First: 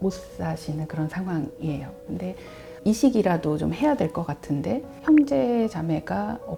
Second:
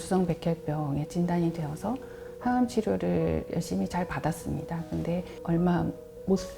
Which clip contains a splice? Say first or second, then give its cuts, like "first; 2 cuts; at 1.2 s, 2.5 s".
second; 1 cut; at 5.3 s